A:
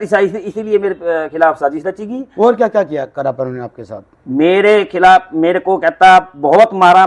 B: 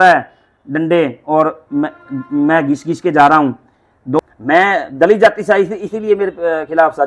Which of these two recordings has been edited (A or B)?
B